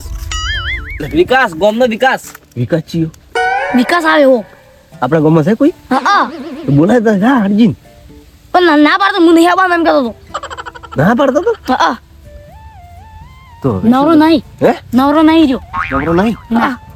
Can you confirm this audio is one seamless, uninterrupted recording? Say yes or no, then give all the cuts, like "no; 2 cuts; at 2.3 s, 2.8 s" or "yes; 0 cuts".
yes; 0 cuts